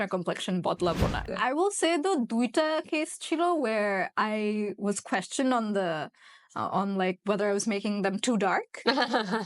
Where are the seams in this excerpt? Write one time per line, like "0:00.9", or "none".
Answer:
0:01.2